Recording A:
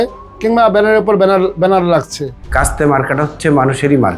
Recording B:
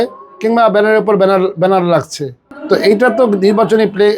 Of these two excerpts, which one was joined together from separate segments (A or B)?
A